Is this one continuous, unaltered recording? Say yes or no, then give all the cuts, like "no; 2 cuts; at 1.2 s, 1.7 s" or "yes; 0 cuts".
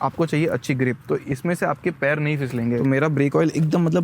no; 1 cut; at 2.8 s